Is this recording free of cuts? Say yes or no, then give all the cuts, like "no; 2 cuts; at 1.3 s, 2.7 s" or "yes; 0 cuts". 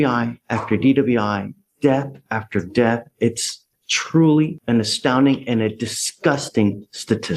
yes; 0 cuts